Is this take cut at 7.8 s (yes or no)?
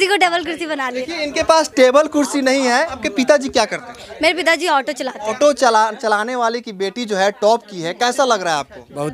no